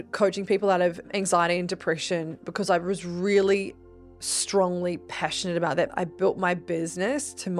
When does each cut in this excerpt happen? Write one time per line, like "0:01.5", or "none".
0:01.1
0:05.9